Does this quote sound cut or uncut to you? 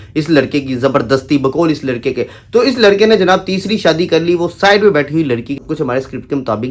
cut